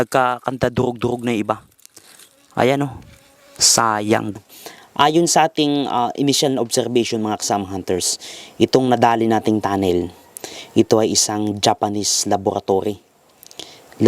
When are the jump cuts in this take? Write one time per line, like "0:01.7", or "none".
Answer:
0:04.4